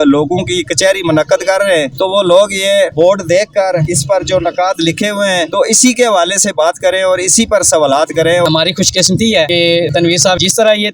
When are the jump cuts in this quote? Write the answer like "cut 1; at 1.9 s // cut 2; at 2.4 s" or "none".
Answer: cut 1; at 8.4 s // cut 2; at 9.9 s